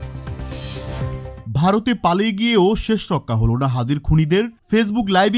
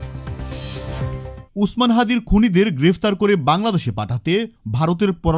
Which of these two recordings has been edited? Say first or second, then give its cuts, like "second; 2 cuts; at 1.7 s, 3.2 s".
second; 1 cut; at 1.5 s